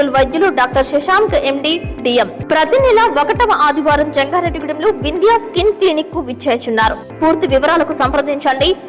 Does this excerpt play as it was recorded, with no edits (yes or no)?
no